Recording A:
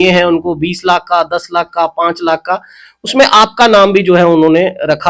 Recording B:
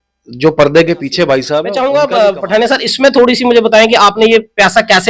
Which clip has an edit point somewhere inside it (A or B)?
B